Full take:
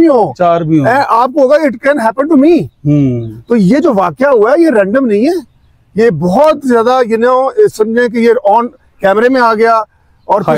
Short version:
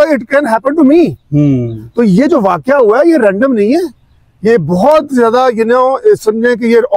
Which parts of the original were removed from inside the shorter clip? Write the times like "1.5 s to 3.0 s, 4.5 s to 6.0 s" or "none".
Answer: none